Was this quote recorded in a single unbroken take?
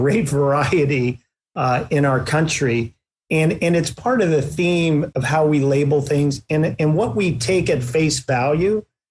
no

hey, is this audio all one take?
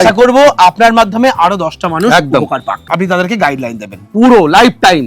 no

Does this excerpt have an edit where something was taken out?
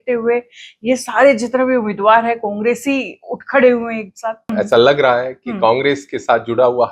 yes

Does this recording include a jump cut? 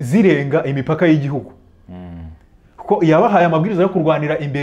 no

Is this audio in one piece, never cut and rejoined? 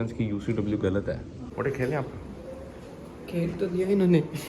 no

